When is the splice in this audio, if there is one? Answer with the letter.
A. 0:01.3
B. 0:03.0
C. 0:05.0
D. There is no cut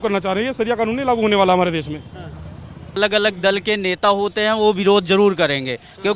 B